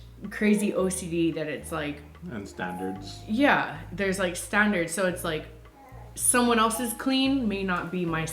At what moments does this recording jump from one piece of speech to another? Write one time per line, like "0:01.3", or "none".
none